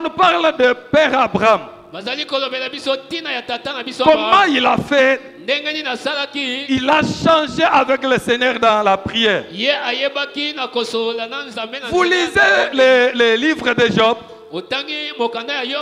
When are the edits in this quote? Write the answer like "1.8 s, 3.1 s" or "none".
none